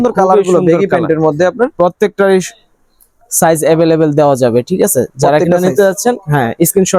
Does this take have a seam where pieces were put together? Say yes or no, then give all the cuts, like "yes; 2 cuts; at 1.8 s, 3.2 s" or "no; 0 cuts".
no; 0 cuts